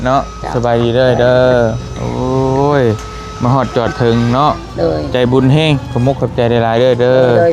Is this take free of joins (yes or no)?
yes